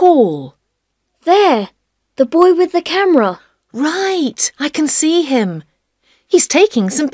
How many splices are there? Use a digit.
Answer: 0